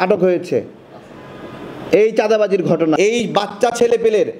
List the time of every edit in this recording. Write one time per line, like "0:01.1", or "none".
0:03.0

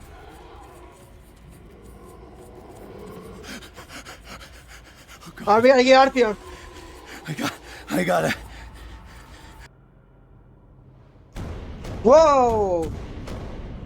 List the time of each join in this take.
0:09.4

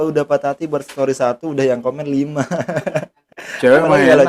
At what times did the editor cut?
0:03.2

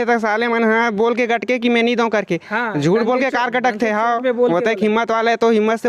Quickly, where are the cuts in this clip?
none

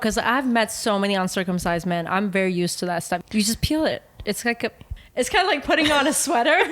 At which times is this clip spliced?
0:03.2
0:04.8

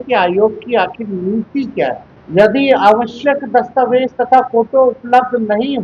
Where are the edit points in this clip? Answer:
0:02.1

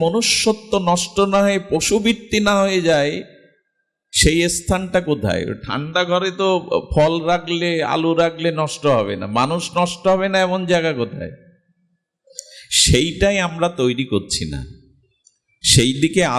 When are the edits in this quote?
none

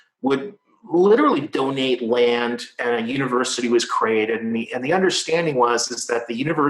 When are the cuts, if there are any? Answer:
none

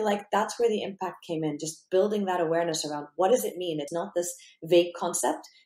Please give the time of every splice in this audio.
0:03.9

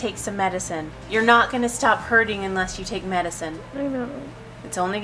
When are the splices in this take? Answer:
none

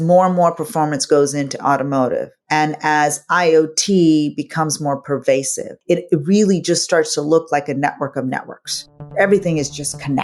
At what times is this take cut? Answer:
0:09.1

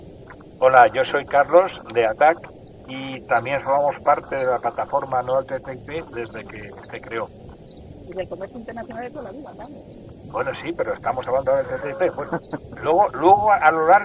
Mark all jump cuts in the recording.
none

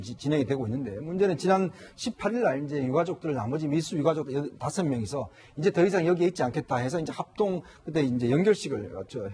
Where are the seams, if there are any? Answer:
0:02.3

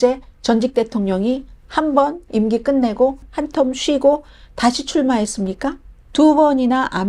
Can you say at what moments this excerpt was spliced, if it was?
0:03.3
0:06.0

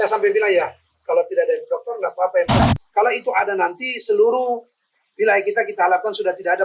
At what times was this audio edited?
0:02.6

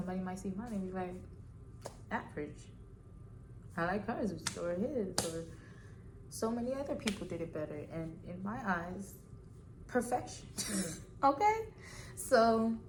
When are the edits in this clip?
none

